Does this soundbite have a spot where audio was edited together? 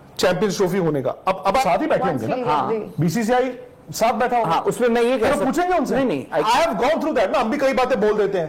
yes; 2 cuts; at 1.6 s, 6.4 s

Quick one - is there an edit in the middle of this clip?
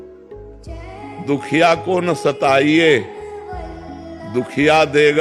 yes; 1 cut; at 1.2 s

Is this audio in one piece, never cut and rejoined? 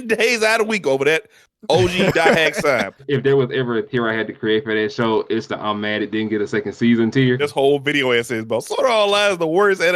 no; 2 cuts; at 3.0 s, 7.4 s

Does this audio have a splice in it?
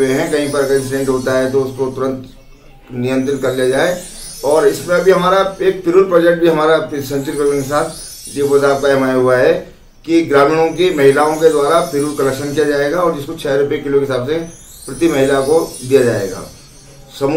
no; 0 cuts

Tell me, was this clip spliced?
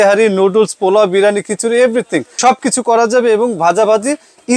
yes; 1 cut; at 2.2 s

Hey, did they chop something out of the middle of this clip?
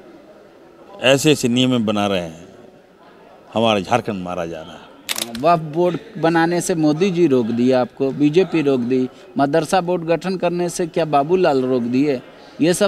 yes; 1 cut; at 5.3 s

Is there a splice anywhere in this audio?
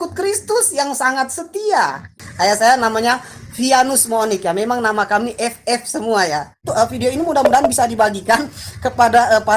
yes; 2 cuts; at 2.1 s, 6.6 s

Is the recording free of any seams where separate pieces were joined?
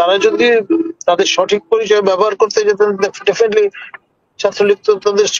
yes; 0 cuts

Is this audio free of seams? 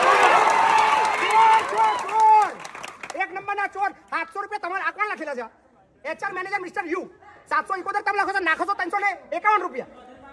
yes; 0 cuts

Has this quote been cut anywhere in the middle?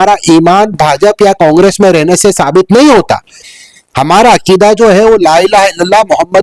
no; 0 cuts

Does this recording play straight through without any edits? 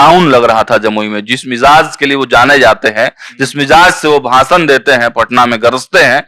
yes; 0 cuts

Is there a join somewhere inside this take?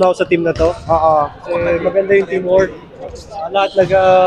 no; 0 cuts

